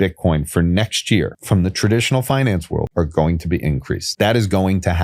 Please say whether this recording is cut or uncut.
cut